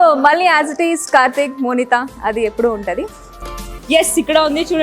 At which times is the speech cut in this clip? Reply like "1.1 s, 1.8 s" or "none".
3.7 s